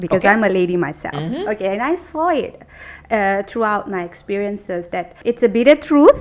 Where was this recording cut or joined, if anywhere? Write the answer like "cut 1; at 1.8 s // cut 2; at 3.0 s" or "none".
cut 1; at 5.1 s